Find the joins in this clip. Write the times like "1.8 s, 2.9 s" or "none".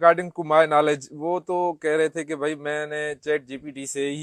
none